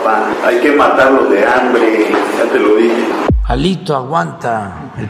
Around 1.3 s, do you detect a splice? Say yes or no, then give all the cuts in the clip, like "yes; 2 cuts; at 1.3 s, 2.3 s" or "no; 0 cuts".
no; 1 cut; at 3.3 s